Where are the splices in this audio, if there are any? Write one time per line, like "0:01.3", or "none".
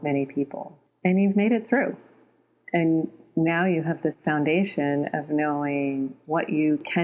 none